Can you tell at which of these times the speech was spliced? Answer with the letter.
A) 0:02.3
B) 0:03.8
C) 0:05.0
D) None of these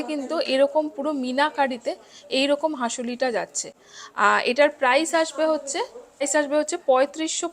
D